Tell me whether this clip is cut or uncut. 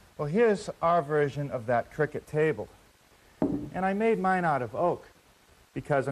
uncut